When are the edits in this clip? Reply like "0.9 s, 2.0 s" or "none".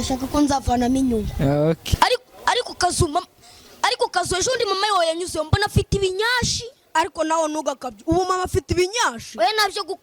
1.8 s